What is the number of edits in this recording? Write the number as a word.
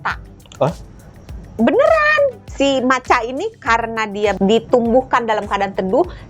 two